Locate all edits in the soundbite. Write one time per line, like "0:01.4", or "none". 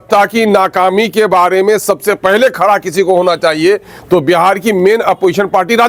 none